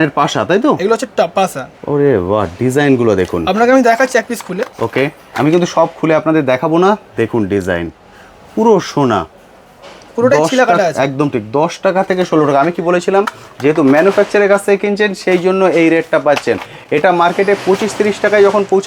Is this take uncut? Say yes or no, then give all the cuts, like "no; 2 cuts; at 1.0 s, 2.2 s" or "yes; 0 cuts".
yes; 0 cuts